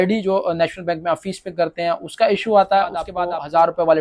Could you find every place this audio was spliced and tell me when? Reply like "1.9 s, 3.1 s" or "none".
3.1 s